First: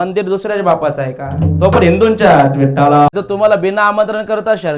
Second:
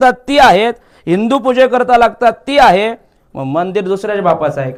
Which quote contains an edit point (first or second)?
first